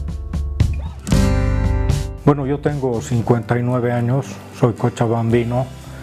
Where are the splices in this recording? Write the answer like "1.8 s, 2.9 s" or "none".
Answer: none